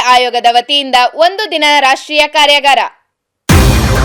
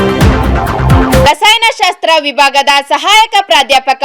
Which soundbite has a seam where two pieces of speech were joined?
second; 1 cut; at 1.2 s

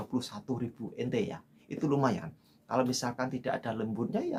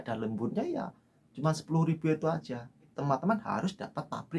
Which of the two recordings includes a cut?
second; 1 cut; at 2.9 s

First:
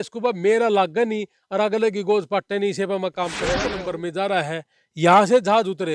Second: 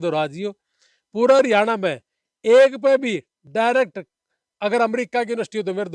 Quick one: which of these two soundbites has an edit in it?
first; 1 cut; at 3.6 s

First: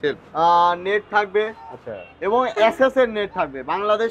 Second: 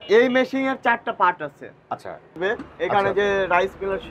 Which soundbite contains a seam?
second; 1 cut; at 2.4 s

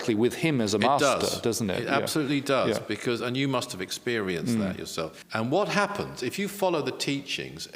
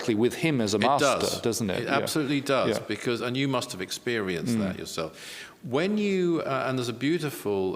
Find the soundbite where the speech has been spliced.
first; 1 cut; at 5.2 s

